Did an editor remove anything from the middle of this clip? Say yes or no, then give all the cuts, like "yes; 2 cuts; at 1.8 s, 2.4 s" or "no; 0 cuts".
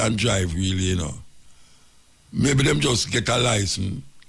no; 0 cuts